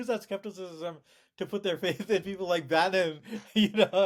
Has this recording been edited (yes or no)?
no